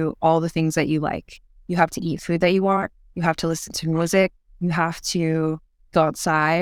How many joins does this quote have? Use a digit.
0